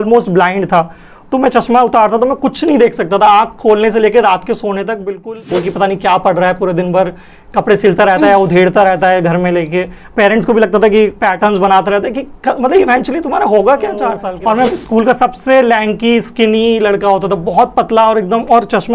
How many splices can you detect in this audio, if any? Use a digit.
2